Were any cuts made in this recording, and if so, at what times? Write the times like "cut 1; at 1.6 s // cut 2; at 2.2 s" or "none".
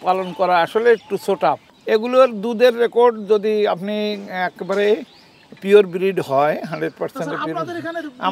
cut 1; at 1.7 s

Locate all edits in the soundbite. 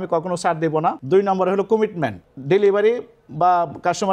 cut 1; at 1.0 s // cut 2; at 2.3 s

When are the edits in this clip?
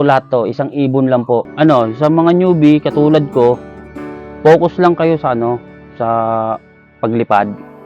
cut 1; at 1.5 s

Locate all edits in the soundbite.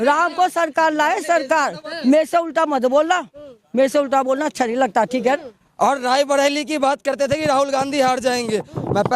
cut 1; at 5.5 s

